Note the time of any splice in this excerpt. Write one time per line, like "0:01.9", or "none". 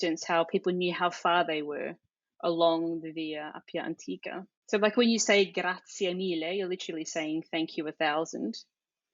0:04.5